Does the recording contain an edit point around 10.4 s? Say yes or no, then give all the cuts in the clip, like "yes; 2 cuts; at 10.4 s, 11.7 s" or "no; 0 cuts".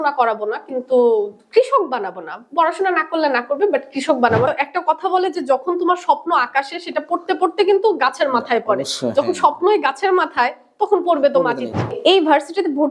no; 2 cuts; at 4.5 s, 11.9 s